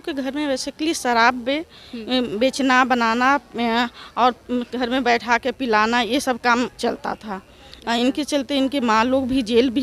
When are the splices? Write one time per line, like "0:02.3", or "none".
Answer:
none